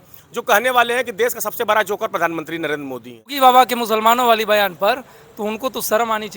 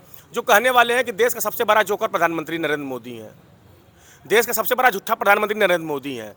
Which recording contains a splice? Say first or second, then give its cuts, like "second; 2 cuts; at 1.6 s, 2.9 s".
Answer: first; 1 cut; at 3.3 s